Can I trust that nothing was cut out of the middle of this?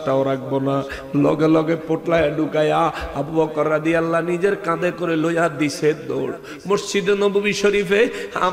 yes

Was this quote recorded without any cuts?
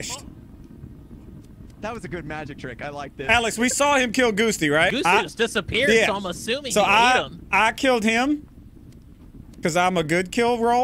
no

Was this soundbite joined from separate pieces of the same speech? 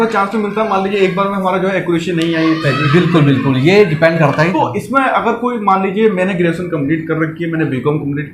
yes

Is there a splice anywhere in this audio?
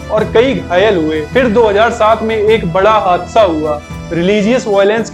no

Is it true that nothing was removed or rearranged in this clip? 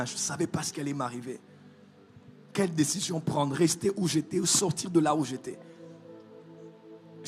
yes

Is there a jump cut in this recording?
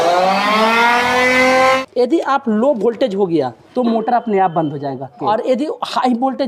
yes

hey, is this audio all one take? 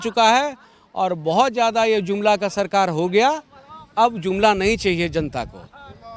yes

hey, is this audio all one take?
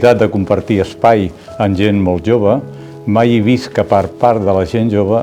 yes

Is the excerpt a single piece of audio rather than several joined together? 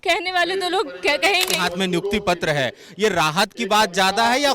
no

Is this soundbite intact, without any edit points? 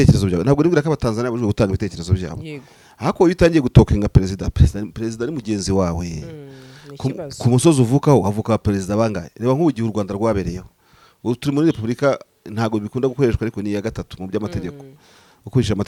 yes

